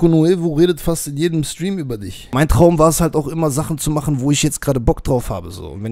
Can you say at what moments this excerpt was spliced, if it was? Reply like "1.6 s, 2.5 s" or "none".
2.3 s